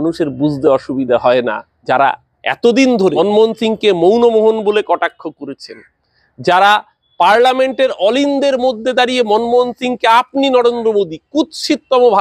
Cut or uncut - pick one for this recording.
cut